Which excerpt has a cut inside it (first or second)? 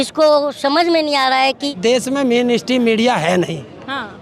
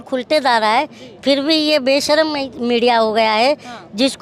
first